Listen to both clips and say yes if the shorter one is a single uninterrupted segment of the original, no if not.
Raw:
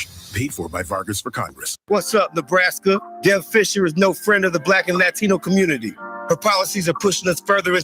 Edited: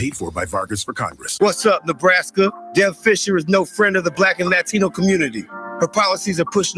no